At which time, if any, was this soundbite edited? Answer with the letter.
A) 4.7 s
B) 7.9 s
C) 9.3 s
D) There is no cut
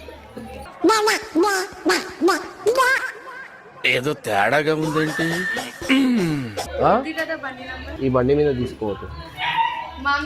B